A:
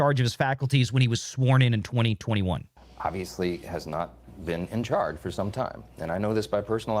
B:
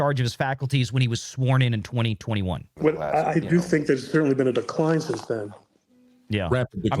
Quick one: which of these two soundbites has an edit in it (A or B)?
A